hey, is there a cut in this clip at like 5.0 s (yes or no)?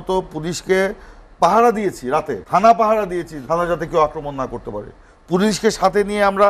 no